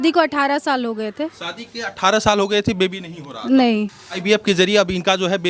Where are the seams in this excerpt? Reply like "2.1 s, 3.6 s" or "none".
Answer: 4.1 s